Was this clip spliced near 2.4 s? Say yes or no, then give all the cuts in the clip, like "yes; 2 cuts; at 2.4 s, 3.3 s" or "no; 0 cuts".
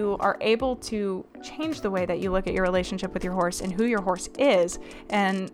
no; 0 cuts